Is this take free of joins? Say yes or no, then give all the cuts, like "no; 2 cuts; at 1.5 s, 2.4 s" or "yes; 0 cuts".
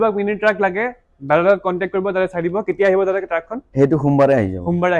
yes; 0 cuts